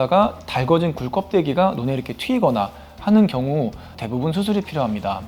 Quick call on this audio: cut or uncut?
cut